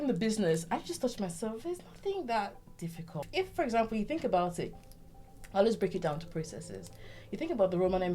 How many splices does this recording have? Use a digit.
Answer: 1